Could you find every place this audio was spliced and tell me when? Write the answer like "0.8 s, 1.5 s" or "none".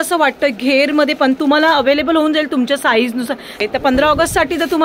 3.6 s